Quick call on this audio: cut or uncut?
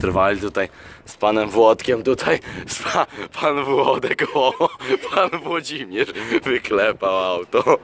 uncut